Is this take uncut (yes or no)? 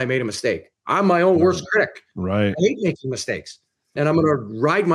no